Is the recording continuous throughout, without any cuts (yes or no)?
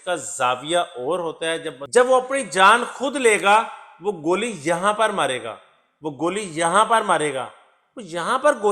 no